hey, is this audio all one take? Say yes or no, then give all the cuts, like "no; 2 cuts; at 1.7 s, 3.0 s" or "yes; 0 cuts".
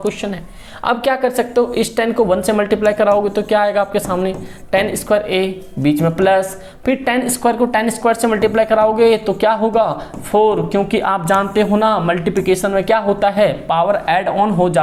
yes; 0 cuts